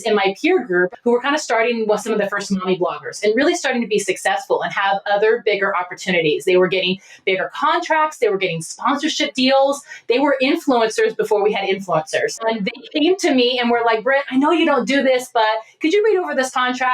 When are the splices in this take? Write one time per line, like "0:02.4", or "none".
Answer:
0:00.9
0:12.4